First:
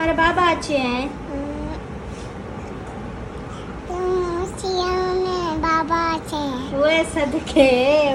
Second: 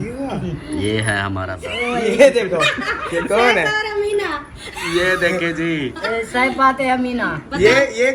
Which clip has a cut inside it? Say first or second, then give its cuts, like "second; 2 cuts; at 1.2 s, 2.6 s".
second; 1 cut; at 1.5 s